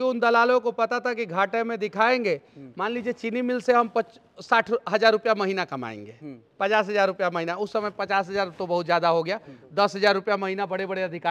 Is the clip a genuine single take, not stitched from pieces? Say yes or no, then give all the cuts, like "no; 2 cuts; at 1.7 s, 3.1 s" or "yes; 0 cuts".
yes; 0 cuts